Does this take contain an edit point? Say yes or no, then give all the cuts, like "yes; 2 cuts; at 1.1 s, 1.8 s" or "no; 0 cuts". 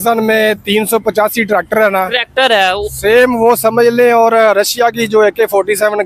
no; 0 cuts